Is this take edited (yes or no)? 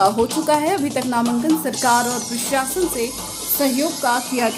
no